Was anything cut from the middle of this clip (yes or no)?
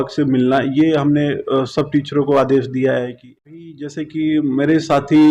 yes